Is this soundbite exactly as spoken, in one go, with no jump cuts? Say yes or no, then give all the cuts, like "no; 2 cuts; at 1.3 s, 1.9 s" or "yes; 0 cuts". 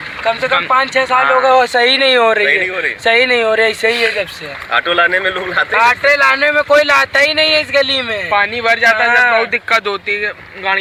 yes; 0 cuts